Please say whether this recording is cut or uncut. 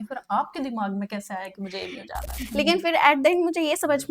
cut